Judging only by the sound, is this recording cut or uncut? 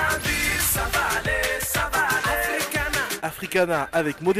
uncut